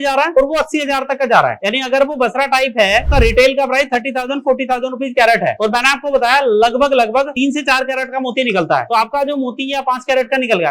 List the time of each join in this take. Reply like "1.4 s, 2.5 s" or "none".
3.1 s